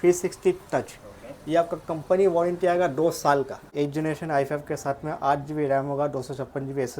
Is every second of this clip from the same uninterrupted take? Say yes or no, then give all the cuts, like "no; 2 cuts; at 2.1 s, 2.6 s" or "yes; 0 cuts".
no; 1 cut; at 3.7 s